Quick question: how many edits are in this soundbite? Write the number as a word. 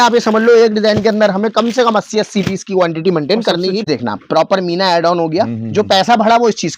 one